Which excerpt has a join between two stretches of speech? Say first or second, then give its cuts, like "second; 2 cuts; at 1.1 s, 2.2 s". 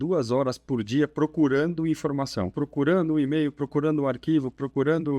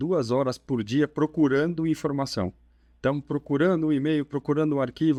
first; 1 cut; at 2.5 s